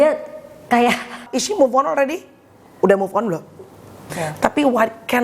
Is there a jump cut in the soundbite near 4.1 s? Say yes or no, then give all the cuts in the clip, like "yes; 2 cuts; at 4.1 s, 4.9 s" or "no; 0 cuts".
yes; 2 cuts; at 1.3 s, 4.1 s